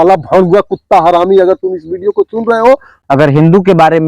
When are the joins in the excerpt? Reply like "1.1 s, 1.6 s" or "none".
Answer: 3.0 s